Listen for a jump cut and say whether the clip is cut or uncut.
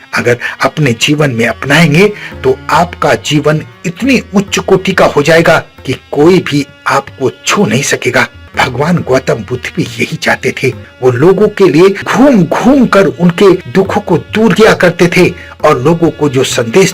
cut